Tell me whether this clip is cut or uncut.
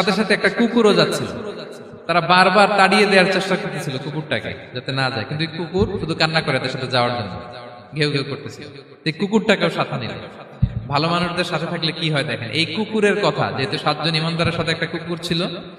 uncut